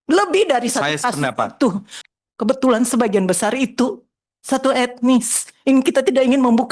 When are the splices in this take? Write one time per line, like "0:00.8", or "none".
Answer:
0:02.0